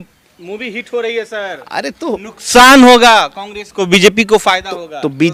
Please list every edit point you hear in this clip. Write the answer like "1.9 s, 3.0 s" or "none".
none